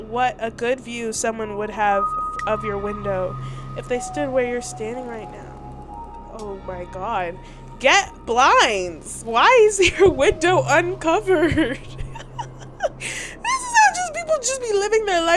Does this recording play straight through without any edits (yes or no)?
yes